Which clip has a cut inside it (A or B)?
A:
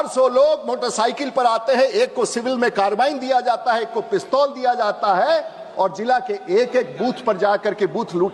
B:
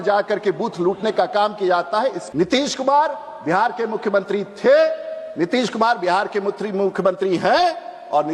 B